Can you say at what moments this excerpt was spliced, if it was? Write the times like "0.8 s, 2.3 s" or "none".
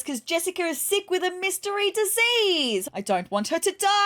2.8 s